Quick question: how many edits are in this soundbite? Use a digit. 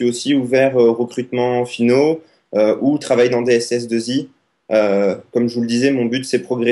0